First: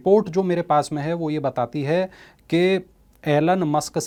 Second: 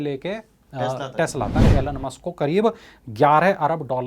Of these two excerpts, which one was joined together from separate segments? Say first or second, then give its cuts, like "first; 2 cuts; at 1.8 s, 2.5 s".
second; 1 cut; at 1.7 s